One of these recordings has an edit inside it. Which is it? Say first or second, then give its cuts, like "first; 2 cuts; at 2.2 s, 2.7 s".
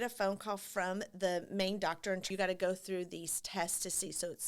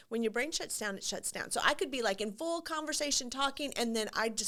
first; 1 cut; at 2.2 s